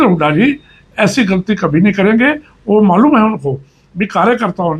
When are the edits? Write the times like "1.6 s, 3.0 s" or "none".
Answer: none

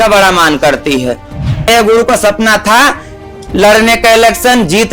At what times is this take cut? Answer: 1.4 s

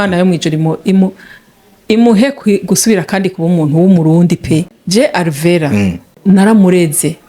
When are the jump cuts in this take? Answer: 4.7 s, 6.1 s

